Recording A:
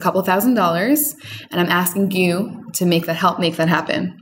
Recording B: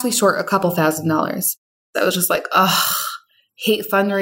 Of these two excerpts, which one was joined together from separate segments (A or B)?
B